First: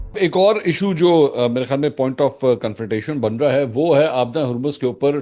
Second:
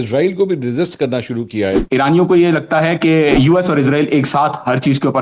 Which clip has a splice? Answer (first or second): second